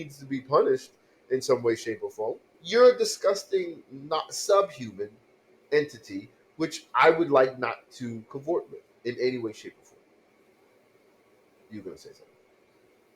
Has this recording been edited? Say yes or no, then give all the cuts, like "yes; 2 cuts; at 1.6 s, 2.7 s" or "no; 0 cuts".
yes; 1 cut; at 2.4 s